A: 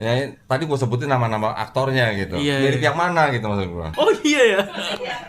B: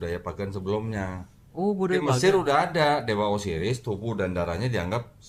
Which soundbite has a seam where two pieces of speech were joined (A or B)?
A